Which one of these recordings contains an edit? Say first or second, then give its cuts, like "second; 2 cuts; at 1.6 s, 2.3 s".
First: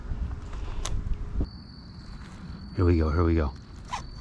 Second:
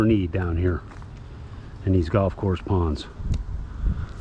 first; 1 cut; at 1.5 s